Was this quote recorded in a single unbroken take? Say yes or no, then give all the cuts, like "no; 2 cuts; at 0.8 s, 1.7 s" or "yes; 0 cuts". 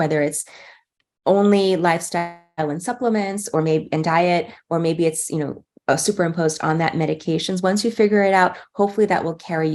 yes; 0 cuts